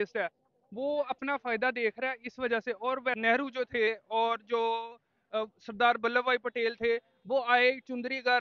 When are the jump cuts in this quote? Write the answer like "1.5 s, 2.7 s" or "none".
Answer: 3.2 s